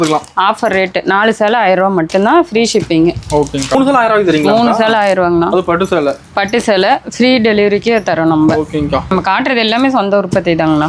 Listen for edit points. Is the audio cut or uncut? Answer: cut